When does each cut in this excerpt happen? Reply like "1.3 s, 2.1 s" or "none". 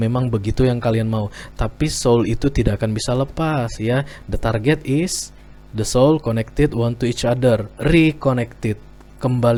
none